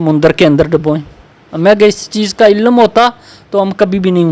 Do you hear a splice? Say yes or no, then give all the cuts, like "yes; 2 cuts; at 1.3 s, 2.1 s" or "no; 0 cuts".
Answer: no; 0 cuts